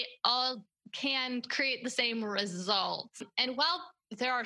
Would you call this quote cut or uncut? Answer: cut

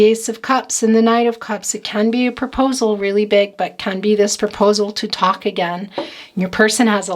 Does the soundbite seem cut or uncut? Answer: uncut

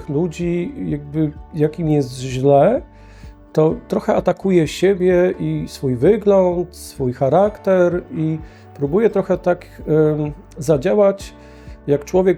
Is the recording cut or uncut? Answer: uncut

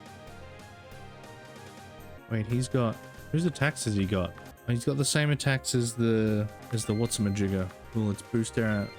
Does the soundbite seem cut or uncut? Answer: cut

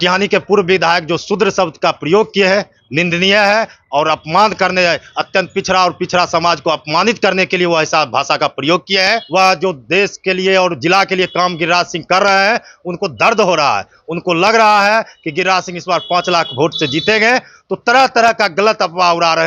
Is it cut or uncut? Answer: cut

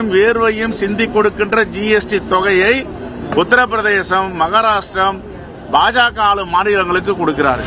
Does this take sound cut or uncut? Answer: uncut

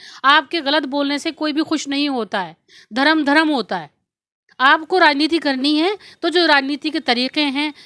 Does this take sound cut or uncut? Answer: uncut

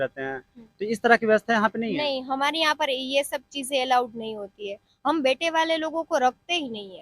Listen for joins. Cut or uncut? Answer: uncut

